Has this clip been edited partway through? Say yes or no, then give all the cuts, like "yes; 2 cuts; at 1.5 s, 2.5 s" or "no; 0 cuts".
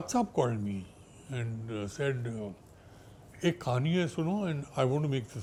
no; 0 cuts